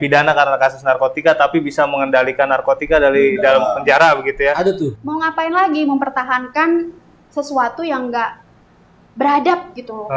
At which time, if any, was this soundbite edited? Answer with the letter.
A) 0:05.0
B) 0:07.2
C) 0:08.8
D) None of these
A